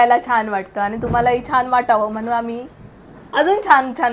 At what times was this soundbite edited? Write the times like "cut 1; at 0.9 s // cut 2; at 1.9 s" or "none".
none